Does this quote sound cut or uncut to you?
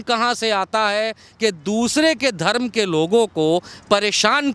uncut